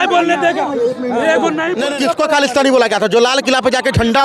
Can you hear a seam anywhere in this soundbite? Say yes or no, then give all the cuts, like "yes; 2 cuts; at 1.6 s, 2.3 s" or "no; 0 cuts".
no; 0 cuts